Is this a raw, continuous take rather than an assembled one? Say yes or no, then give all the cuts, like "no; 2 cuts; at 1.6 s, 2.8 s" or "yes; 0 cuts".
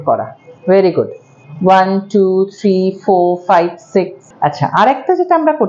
no; 1 cut; at 4.2 s